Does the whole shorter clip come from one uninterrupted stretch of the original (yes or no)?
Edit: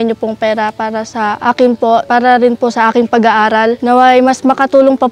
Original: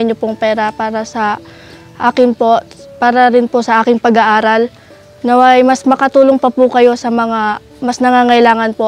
no